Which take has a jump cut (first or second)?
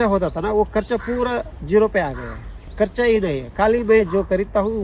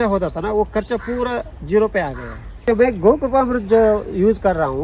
second